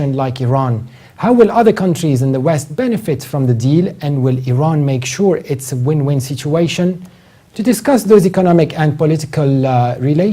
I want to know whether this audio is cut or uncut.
cut